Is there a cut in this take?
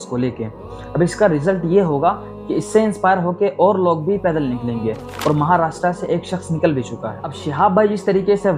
yes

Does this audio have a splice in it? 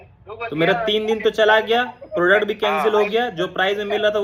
no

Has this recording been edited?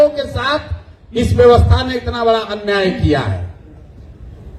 no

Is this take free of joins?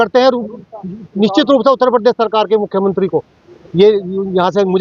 yes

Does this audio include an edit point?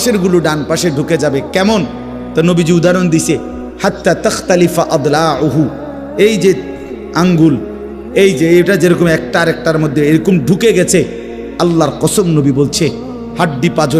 no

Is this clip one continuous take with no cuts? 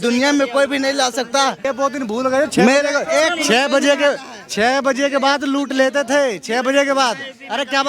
no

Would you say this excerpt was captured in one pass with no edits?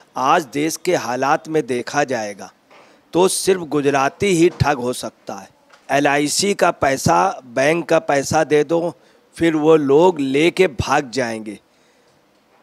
no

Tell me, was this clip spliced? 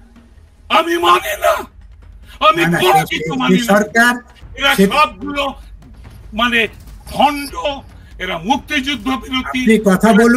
no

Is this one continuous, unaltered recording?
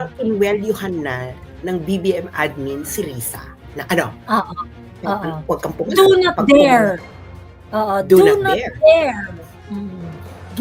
yes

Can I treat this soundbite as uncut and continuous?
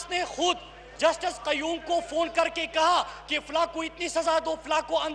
yes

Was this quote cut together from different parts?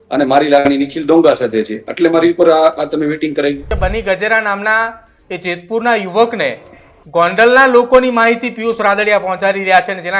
yes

